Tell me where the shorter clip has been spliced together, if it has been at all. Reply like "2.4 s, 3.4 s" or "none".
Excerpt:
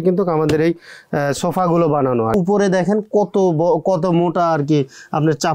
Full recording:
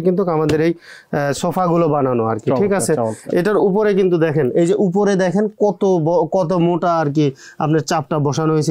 2.3 s